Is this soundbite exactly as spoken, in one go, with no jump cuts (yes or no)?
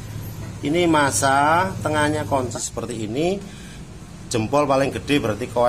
no